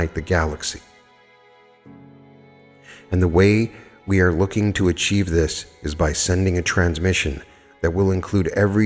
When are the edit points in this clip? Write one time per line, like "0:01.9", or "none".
none